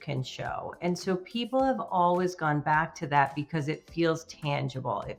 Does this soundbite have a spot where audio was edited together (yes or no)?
no